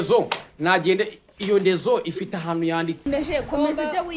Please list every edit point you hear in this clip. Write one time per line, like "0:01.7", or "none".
0:03.1